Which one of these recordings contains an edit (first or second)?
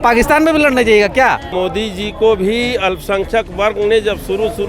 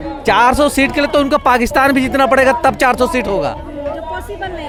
first